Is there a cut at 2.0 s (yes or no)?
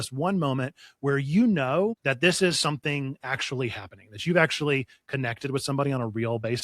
yes